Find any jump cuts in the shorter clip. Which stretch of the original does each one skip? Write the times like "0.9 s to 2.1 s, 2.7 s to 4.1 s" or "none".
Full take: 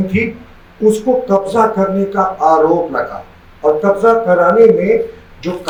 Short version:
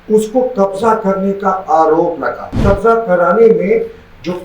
3.3 s to 3.8 s